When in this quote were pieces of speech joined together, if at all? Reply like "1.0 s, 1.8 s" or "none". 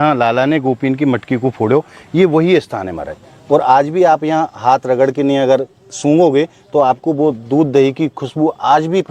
none